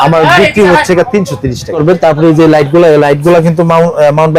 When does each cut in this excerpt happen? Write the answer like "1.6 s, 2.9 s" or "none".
1.8 s

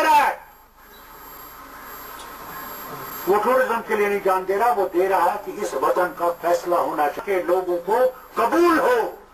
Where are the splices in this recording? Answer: 7.2 s

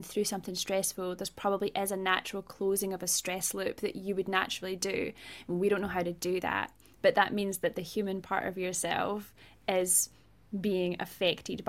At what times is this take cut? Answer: none

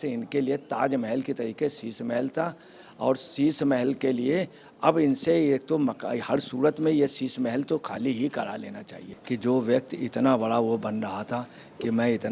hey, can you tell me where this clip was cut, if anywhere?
9.1 s

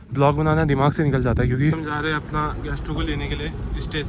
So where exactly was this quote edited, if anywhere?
1.8 s

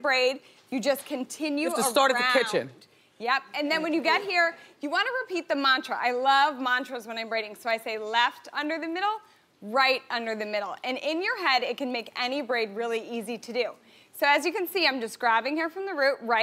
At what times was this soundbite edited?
none

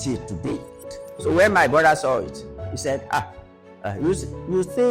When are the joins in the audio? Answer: 1.0 s

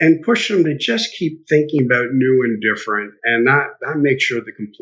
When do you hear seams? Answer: none

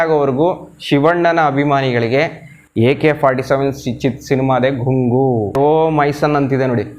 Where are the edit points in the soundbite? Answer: 5.6 s

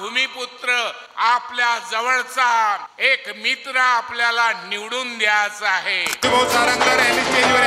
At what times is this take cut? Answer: 1.0 s, 2.9 s, 6.2 s

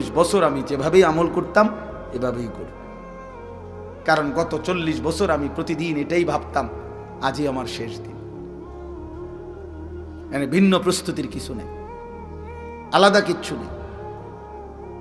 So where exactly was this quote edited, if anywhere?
none

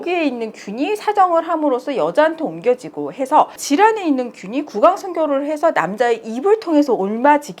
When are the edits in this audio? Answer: 3.5 s

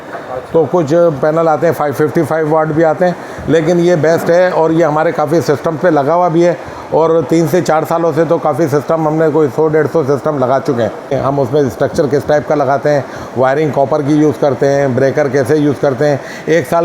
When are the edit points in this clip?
11.1 s

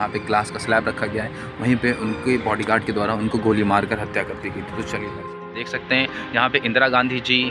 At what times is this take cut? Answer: 5.7 s

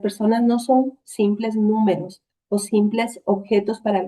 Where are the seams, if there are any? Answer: none

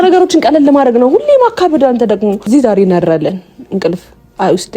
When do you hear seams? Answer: 2.5 s

